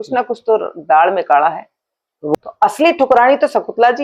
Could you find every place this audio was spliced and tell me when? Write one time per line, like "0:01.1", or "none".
0:02.3